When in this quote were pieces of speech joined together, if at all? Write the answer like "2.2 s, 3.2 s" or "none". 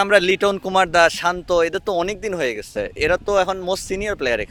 none